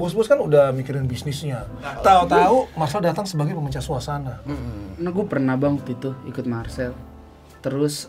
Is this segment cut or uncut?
cut